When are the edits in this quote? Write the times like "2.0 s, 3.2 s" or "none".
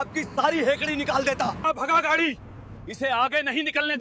1.6 s